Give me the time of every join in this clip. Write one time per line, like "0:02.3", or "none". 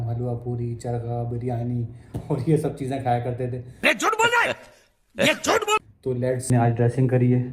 0:06.5